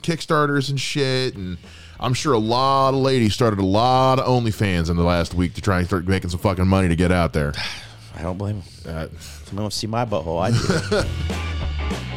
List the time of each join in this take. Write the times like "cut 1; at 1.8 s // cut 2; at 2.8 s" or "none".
cut 1; at 11.2 s

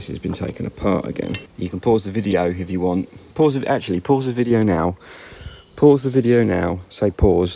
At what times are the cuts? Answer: cut 1; at 1.5 s

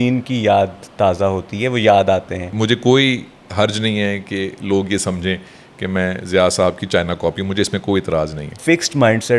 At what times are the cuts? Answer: cut 1; at 2.4 s // cut 2; at 8.5 s

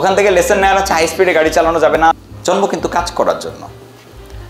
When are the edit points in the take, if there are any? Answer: cut 1; at 2.2 s

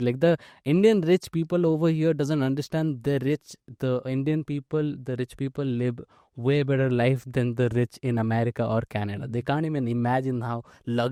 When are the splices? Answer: none

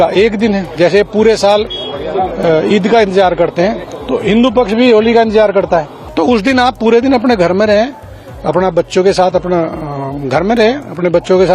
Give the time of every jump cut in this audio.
cut 1; at 6.0 s

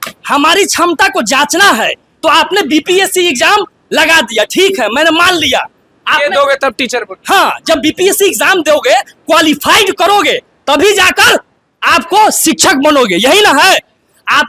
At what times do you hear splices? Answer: none

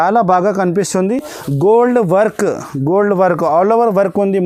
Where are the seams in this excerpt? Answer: none

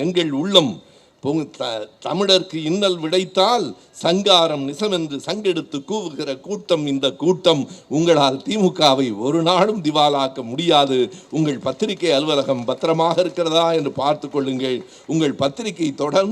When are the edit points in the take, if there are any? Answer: none

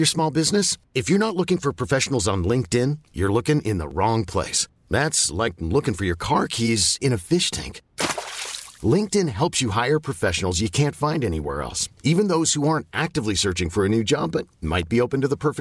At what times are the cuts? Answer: none

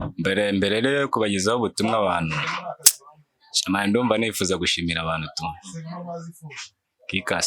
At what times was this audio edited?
none

